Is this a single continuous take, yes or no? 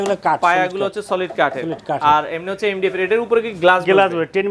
yes